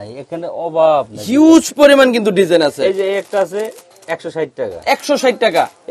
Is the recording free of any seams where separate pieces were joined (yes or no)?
yes